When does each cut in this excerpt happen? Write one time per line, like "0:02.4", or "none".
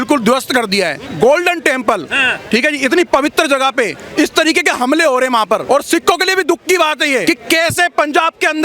0:01.0
0:05.6
0:07.2